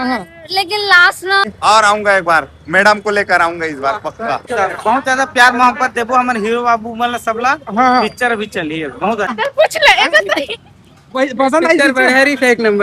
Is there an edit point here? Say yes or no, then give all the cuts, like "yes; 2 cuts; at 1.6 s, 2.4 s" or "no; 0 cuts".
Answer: yes; 3 cuts; at 1.5 s, 4.5 s, 9.3 s